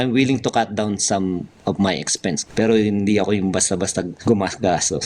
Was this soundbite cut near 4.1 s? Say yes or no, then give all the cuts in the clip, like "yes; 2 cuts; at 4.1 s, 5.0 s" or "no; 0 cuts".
yes; 2 cuts; at 2.4 s, 4.1 s